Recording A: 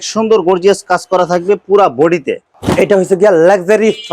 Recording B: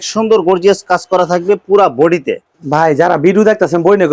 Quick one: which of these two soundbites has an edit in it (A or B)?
A